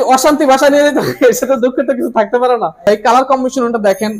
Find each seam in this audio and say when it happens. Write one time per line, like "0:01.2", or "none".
0:02.8